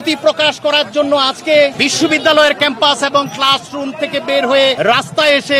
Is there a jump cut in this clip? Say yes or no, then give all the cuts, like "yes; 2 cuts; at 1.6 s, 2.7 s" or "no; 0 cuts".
yes; 2 cuts; at 1.8 s, 4.8 s